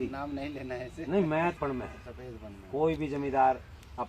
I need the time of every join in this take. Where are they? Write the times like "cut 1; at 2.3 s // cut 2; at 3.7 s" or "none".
cut 1; at 1.5 s